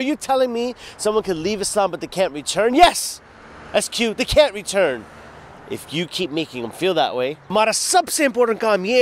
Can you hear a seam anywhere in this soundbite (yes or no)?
yes